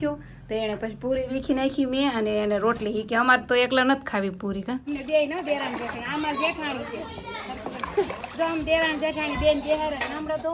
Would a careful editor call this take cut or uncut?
cut